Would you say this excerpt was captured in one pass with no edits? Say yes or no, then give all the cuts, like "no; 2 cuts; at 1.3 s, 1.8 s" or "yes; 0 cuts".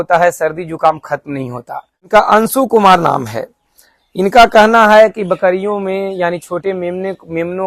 no; 1 cut; at 2.0 s